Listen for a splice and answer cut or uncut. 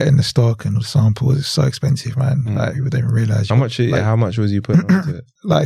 uncut